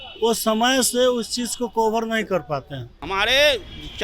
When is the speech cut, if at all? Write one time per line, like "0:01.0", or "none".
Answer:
0:03.0

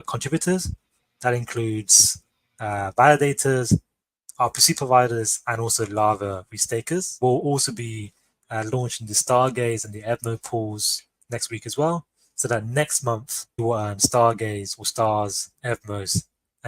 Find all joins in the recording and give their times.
0:07.1
0:13.5

